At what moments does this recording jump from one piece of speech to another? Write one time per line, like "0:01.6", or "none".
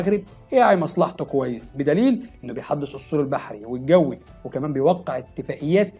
none